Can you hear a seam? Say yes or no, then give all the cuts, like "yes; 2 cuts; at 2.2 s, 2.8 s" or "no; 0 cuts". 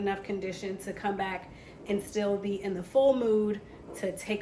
no; 0 cuts